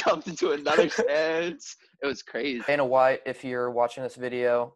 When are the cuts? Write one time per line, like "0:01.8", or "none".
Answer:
0:02.6